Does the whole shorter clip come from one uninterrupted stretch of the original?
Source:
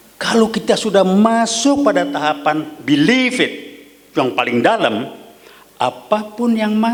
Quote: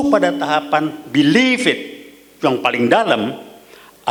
yes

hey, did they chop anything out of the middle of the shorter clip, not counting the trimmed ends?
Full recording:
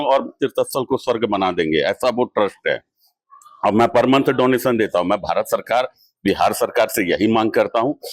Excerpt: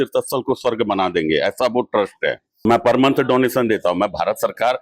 yes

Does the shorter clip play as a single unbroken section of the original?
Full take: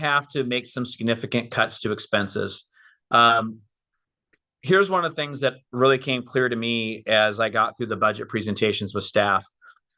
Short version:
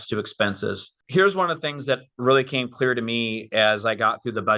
no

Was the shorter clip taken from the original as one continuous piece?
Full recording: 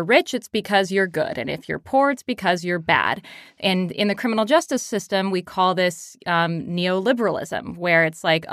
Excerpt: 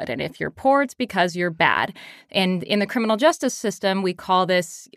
yes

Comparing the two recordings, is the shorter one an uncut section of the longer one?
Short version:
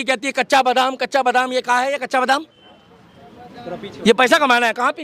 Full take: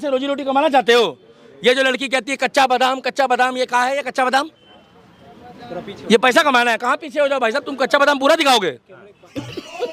yes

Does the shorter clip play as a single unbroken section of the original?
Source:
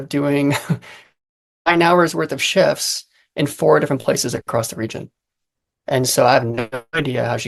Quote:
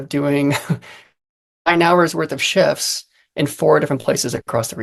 yes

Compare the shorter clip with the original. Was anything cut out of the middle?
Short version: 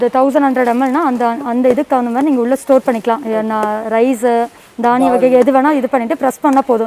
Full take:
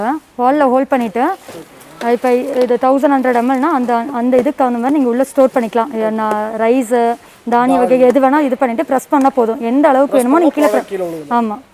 no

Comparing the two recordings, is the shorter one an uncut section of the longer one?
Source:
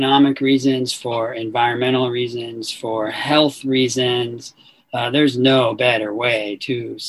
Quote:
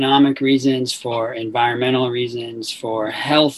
yes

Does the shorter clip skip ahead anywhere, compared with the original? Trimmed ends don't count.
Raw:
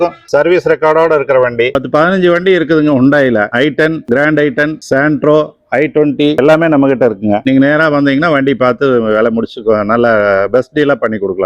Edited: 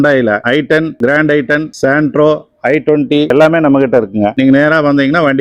no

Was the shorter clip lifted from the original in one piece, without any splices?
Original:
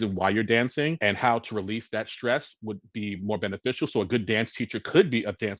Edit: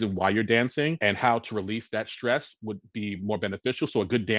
yes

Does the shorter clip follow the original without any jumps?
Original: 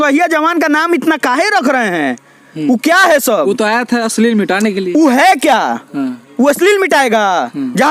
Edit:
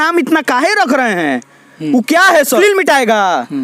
no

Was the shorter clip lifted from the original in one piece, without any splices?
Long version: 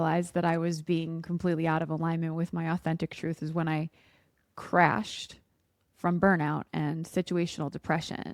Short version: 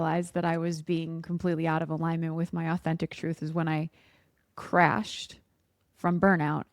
yes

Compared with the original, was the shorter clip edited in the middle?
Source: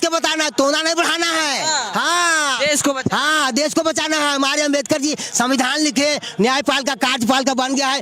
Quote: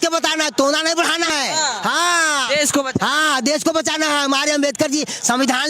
yes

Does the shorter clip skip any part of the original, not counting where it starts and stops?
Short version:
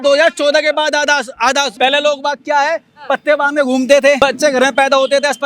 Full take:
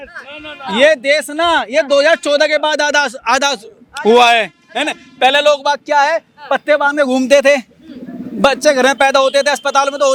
yes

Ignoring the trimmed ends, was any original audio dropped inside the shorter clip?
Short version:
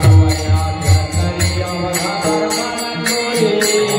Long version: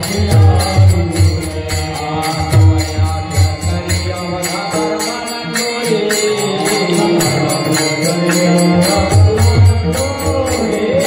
no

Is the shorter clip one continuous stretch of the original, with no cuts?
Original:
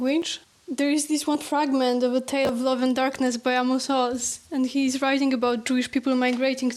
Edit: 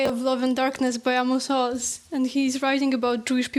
yes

